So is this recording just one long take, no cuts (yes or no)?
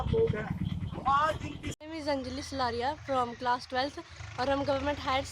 no